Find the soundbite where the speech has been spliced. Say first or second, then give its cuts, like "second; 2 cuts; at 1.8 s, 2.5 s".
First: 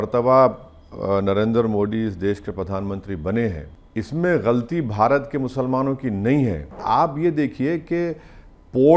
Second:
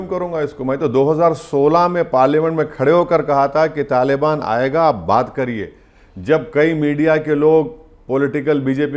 first; 2 cuts; at 3.7 s, 6.8 s